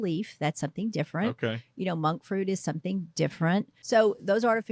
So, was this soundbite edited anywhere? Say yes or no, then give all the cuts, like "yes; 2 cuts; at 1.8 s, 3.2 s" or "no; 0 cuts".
yes; 1 cut; at 3.8 s